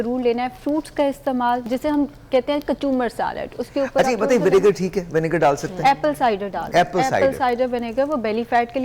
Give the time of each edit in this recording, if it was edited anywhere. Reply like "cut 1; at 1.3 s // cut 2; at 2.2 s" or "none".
cut 1; at 1.6 s